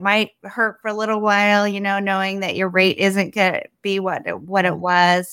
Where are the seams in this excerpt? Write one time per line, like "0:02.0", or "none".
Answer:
none